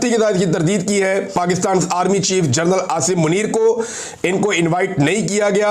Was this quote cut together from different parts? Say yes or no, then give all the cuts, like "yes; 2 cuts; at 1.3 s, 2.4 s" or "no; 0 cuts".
yes; 1 cut; at 1.3 s